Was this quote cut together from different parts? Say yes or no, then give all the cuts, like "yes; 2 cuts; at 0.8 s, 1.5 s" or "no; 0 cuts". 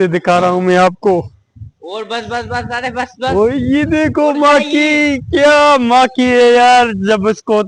no; 0 cuts